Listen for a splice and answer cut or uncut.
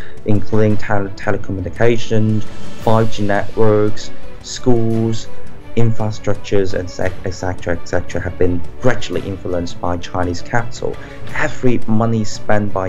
cut